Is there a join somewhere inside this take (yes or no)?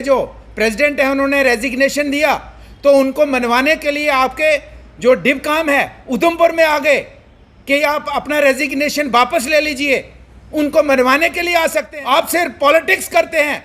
yes